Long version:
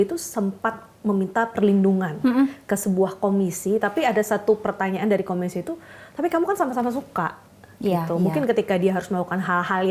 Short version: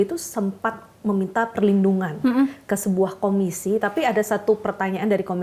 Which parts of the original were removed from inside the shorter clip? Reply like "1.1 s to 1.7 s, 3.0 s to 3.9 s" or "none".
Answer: none